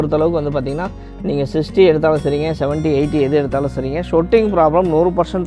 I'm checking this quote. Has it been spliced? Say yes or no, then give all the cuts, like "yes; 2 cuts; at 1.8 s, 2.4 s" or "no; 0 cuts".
no; 0 cuts